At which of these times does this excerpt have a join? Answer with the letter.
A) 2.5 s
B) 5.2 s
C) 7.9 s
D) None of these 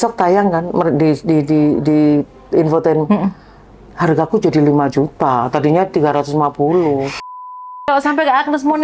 C